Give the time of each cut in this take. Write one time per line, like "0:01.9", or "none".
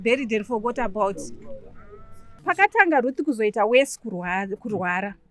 0:02.4